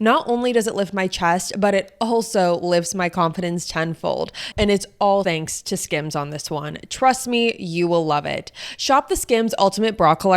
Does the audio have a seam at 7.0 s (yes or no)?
no